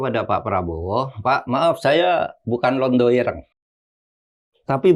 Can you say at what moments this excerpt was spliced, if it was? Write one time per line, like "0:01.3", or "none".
none